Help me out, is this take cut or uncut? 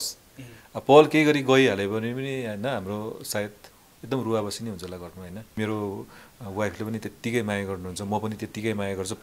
cut